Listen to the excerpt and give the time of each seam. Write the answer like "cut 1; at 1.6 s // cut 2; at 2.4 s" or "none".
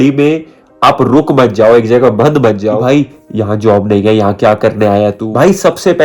cut 1; at 2.8 s // cut 2; at 5.2 s